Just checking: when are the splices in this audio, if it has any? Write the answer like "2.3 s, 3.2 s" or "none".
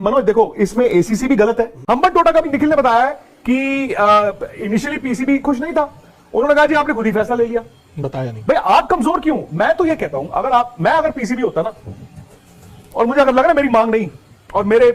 1.8 s